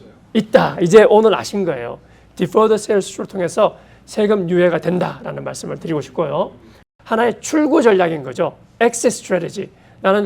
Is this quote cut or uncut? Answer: cut